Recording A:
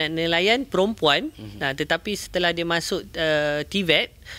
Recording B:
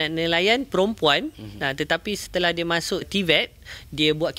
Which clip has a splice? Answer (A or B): B